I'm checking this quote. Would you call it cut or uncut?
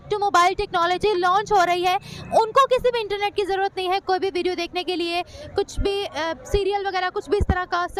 uncut